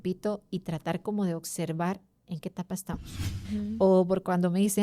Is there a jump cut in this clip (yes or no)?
yes